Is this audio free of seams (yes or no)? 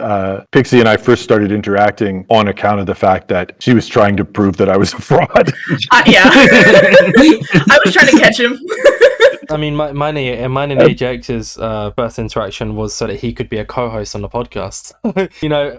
yes